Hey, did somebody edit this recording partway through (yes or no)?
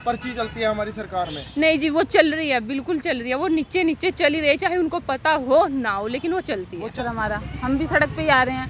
yes